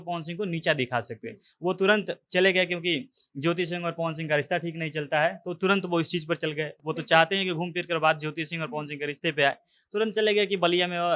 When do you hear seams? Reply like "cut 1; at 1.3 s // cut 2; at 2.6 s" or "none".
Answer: none

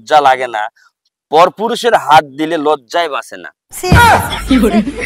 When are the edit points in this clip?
cut 1; at 3.9 s

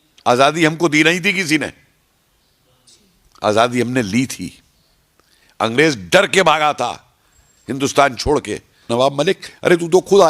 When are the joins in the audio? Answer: cut 1; at 8.9 s

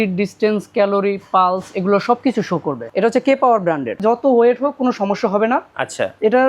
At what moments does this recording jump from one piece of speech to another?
cut 1; at 2.8 s // cut 2; at 4.0 s

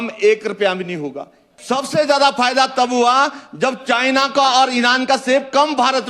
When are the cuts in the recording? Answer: cut 1; at 1.5 s

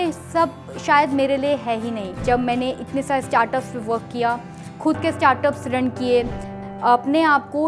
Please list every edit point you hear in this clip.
cut 1; at 2.2 s // cut 2; at 6.5 s

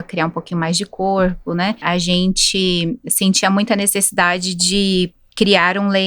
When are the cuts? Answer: cut 1; at 1.8 s

